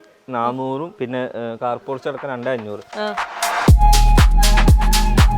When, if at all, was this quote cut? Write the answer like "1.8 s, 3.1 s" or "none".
0.9 s, 3.3 s